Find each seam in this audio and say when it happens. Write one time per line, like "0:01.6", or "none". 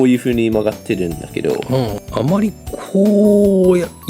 0:02.0